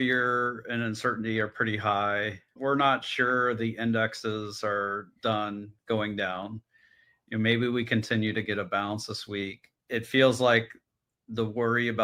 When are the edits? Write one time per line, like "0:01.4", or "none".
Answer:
none

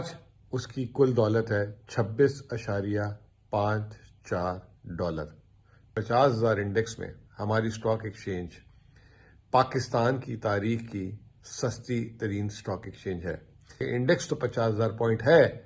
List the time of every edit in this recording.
0:05.9
0:13.9

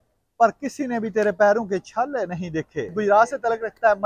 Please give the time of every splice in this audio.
0:02.9

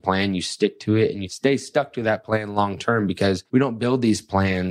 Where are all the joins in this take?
0:01.3
0:03.4

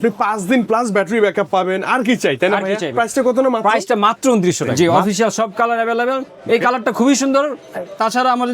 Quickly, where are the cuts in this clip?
0:04.7

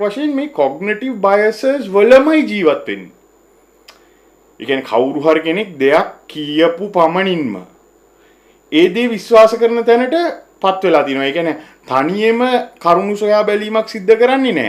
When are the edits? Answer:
none

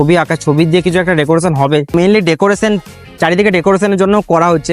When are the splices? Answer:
0:01.9

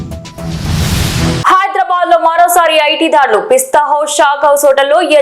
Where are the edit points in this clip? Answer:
0:01.4

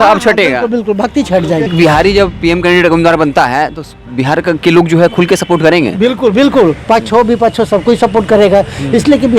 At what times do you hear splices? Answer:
0:01.7

